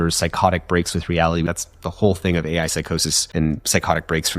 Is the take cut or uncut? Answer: cut